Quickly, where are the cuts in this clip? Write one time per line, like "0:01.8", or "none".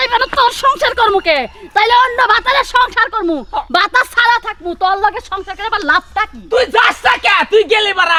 none